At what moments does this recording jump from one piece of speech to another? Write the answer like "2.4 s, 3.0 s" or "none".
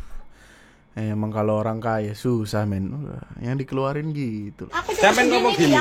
4.7 s